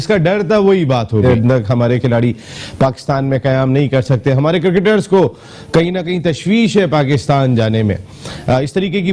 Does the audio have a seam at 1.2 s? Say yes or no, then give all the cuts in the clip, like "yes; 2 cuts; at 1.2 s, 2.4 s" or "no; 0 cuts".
yes; 1 cut; at 1.2 s